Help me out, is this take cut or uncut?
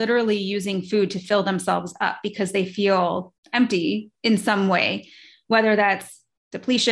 cut